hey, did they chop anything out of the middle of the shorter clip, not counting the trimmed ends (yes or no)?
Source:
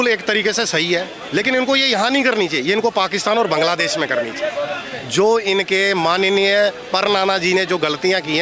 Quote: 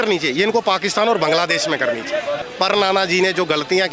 yes